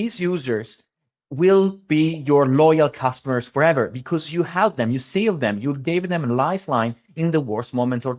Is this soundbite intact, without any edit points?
yes; 0 cuts

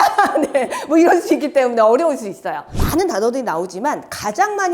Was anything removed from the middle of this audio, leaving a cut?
yes; 1 cut; at 2.8 s

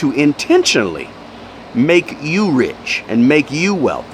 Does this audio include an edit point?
no; 0 cuts

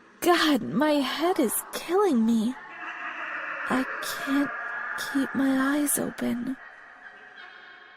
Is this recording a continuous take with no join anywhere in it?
no; 1 cut; at 6.7 s

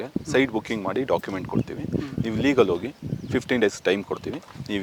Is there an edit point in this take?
no; 0 cuts

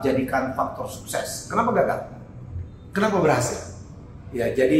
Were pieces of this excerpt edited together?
no; 0 cuts

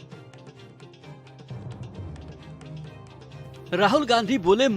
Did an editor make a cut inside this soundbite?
yes; 1 cut; at 3.7 s

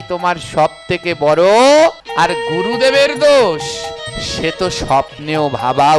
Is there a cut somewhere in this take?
yes; 1 cut; at 2.0 s

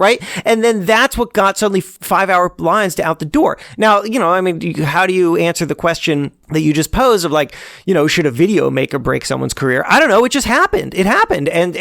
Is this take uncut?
no; 2 cuts; at 1.9 s, 6.4 s

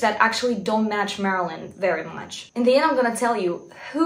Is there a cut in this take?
yes; 1 cut; at 2.5 s

